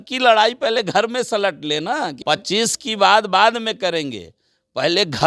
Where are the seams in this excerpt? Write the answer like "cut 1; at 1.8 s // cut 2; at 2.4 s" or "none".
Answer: cut 1; at 2.2 s